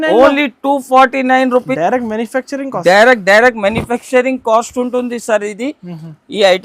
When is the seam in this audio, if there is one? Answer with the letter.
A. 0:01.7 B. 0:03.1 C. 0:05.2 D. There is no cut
A